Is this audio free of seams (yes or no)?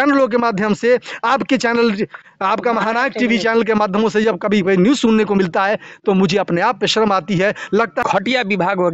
no